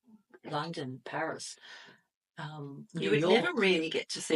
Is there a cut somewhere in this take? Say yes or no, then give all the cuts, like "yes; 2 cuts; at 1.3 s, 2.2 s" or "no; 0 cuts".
no; 0 cuts